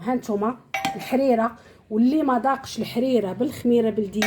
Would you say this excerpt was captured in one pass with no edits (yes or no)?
yes